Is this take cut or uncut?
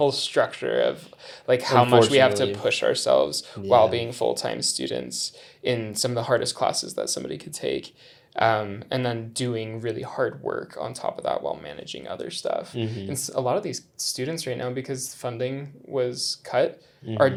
uncut